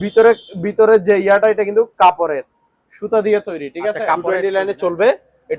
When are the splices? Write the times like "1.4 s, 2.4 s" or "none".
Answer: 4.2 s